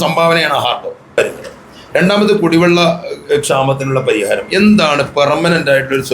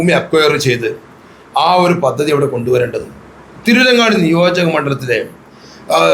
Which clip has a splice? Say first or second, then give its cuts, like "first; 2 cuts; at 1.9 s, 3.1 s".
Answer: first; 1 cut; at 1.2 s